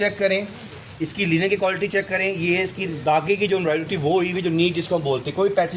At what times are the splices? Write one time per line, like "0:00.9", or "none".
none